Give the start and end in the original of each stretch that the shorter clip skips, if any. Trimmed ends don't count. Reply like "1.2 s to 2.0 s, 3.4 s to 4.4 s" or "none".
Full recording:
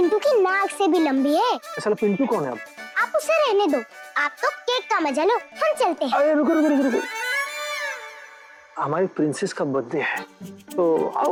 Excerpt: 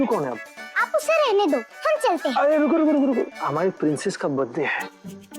3.9 s to 5.5 s, 7.1 s to 8.7 s